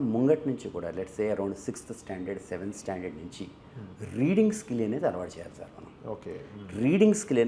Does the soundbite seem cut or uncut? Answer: uncut